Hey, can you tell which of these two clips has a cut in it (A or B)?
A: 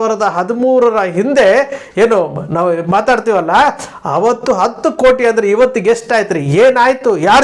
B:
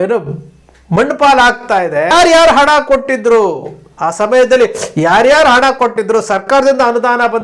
B